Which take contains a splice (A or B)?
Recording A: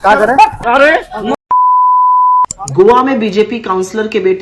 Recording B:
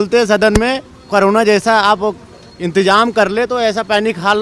A